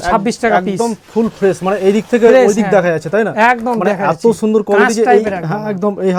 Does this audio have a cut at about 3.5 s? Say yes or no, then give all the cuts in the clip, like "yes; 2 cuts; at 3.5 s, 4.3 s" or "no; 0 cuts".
no; 0 cuts